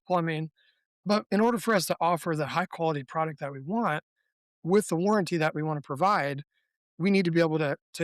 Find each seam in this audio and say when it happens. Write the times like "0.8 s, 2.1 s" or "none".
0.9 s